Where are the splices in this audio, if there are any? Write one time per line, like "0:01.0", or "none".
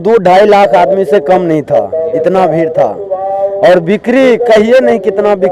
none